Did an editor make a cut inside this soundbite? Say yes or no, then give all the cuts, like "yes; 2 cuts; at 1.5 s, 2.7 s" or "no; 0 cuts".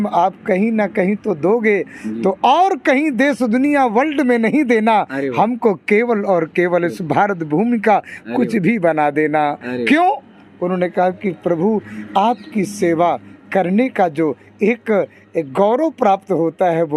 no; 0 cuts